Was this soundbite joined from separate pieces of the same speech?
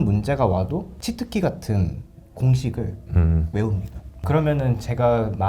yes; 2 cuts; at 0.9 s, 4.2 s

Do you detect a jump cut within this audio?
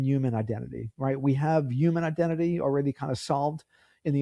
no; 0 cuts

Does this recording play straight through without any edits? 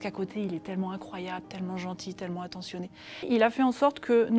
no; 1 cut; at 3.3 s

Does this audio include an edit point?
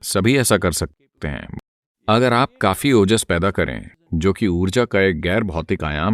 yes; 1 cut; at 1.5 s

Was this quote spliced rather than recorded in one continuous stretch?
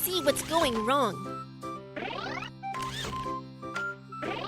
no; 0 cuts

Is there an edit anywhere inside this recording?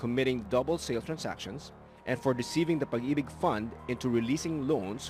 no; 0 cuts

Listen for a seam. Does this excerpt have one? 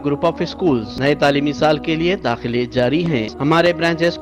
yes; 2 cuts; at 0.9 s, 3.3 s

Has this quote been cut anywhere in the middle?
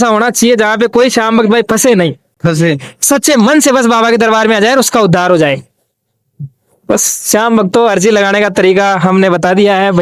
no; 0 cuts

